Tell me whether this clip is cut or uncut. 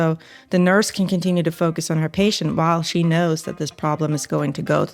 uncut